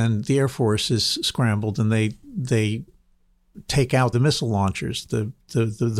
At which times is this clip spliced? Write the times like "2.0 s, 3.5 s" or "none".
4.1 s

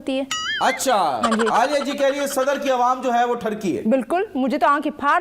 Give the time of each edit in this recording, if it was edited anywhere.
none

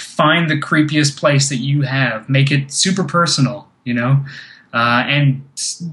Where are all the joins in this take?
none

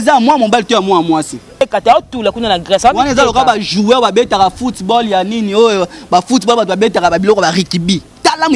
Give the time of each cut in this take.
1.5 s

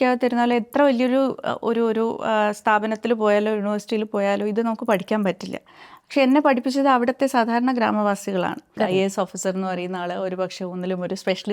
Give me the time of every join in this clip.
8.8 s

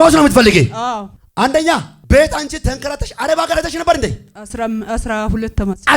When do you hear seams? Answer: 1.2 s, 1.9 s

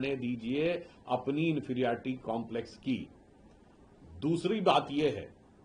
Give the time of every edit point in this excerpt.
none

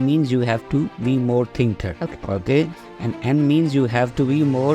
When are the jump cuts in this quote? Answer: 1.9 s

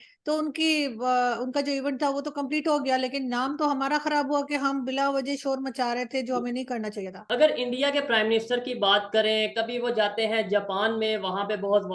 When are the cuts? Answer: 7.2 s

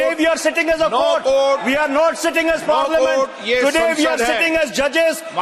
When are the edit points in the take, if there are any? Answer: none

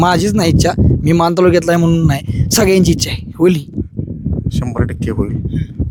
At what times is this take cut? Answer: none

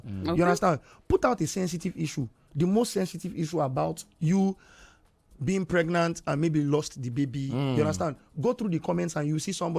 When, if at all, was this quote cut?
none

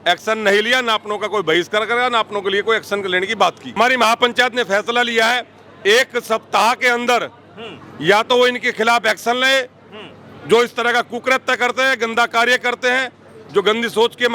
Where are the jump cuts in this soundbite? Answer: 3.8 s

